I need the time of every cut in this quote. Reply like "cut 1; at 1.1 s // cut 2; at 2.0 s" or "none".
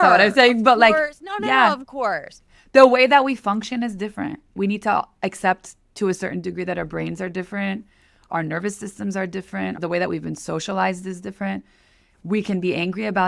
cut 1; at 4.5 s // cut 2; at 8.2 s // cut 3; at 9.8 s

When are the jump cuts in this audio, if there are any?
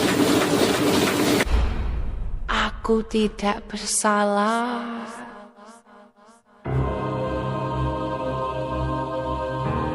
cut 1; at 1.6 s

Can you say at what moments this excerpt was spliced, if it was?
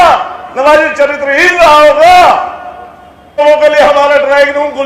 cut 1; at 3.4 s

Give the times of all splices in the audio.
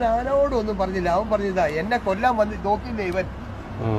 none

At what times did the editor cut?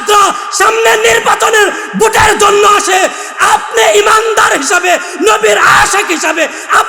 none

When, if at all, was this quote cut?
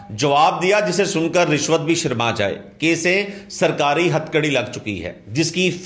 none

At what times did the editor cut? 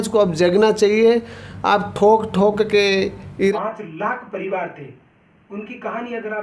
cut 1; at 3.5 s

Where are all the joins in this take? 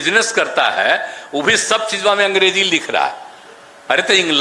none

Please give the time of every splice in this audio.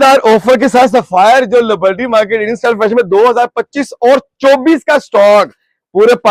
none

